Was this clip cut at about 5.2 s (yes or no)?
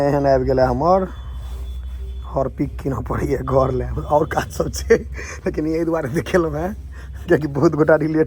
no